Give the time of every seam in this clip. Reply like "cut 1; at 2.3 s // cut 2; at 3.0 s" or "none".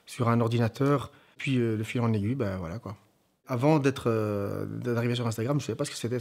cut 1; at 1.4 s // cut 2; at 3.5 s